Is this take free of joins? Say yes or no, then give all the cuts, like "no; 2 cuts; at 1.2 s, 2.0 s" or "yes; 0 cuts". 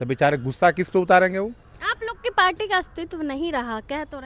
yes; 0 cuts